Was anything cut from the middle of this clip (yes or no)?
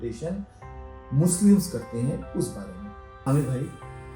yes